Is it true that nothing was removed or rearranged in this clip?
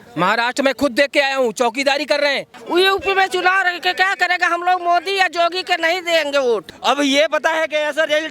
no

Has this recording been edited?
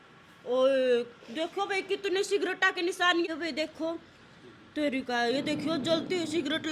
yes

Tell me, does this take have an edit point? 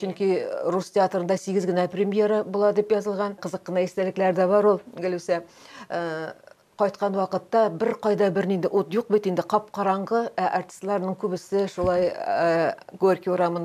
yes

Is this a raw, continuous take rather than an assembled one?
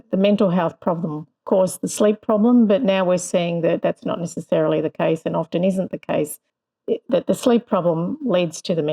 yes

